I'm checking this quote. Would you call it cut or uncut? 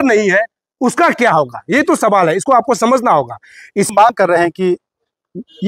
cut